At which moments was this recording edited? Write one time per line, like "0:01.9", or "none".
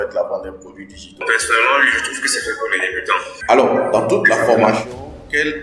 0:01.2
0:03.3